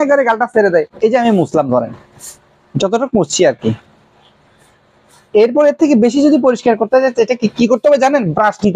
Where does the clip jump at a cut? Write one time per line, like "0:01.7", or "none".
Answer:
0:00.9